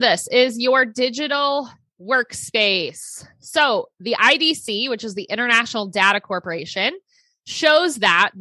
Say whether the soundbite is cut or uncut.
uncut